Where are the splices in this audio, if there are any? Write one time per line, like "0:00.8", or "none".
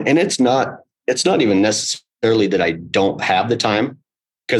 none